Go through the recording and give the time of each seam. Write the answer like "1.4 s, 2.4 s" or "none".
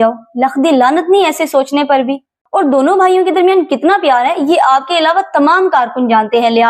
2.4 s